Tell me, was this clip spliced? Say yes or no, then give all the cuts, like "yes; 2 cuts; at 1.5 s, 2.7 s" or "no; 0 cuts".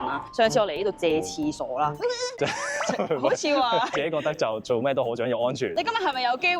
yes; 2 cuts; at 2.2 s, 5.8 s